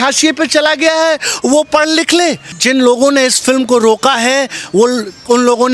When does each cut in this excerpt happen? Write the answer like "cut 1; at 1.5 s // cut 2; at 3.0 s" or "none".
cut 1; at 2.5 s